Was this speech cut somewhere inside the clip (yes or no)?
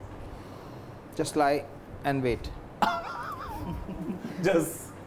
no